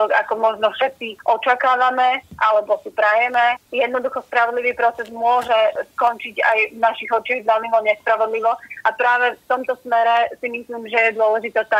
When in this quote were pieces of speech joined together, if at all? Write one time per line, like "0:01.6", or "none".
none